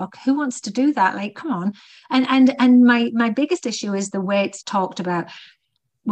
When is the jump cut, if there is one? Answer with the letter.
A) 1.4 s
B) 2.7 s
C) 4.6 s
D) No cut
C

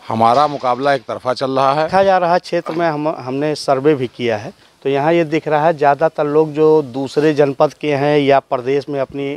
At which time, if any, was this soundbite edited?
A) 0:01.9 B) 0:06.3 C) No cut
A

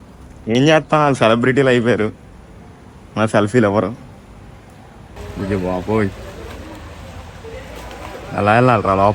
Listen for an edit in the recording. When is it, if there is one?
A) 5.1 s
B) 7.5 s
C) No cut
A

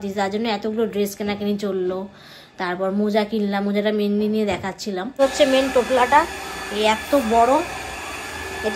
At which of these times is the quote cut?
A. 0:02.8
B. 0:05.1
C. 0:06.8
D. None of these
B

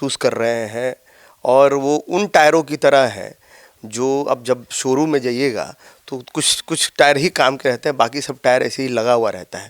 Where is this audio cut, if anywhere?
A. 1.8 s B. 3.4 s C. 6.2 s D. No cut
D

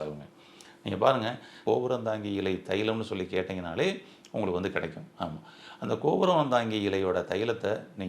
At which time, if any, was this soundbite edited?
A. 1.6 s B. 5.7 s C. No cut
A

